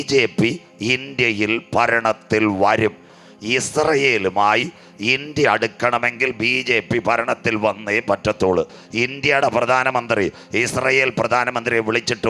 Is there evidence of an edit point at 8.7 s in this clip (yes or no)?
yes